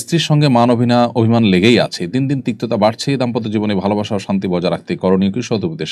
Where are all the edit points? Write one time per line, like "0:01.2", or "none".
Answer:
none